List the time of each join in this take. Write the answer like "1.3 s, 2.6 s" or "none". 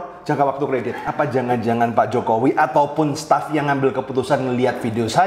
1.0 s

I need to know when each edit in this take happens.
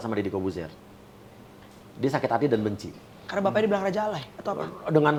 none

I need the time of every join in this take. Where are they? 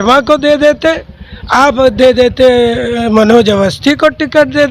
none

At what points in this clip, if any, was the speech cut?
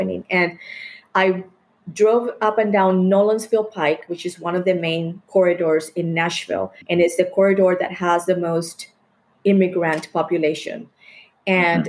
6.8 s

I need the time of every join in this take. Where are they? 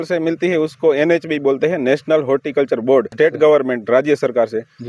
3.1 s

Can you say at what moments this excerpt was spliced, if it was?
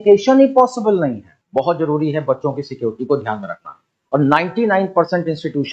1.3 s

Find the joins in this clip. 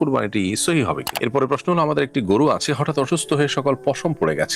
1.1 s

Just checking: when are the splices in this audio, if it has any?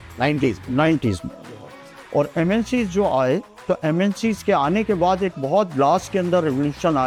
none

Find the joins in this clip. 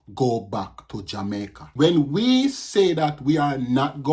1.6 s

